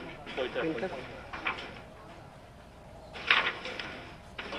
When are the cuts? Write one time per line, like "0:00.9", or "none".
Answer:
none